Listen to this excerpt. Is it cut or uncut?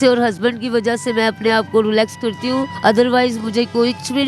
cut